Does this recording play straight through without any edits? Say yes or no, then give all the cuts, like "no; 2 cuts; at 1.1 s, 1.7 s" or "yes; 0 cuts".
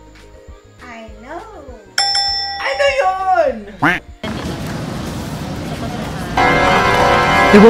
no; 1 cut; at 4.2 s